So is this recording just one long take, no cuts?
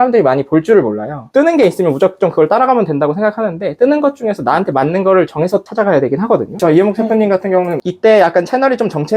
no; 2 cuts; at 6.5 s, 7.8 s

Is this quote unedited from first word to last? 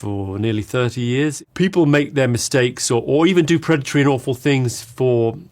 no; 1 cut; at 1.4 s

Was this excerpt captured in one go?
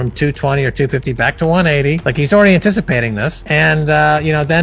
yes; 0 cuts

